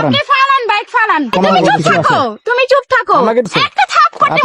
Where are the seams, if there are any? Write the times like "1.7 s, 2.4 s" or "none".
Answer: 1.3 s, 3.6 s